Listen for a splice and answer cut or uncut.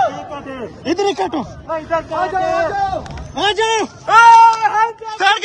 uncut